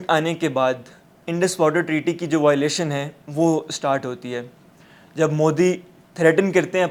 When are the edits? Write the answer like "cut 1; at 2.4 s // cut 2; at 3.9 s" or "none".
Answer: none